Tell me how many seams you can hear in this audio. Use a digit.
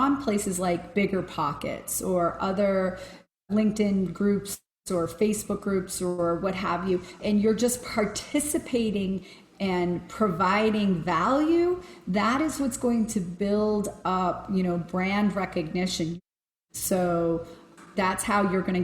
4